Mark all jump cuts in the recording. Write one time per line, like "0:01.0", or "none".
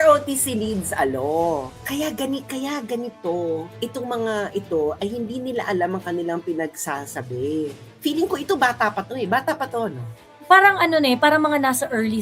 0:01.7
0:07.9